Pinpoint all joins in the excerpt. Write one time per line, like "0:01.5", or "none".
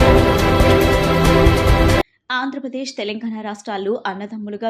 0:02.0